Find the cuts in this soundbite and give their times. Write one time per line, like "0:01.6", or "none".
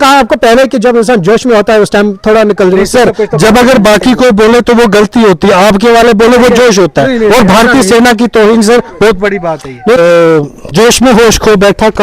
0:10.0